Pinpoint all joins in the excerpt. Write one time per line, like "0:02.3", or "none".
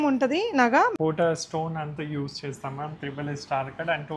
0:00.9